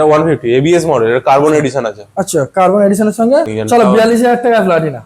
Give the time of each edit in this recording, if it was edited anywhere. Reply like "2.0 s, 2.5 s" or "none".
3.4 s